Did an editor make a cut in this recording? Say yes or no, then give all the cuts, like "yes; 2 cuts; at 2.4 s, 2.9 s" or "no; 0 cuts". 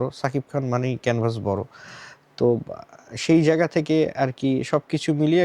no; 0 cuts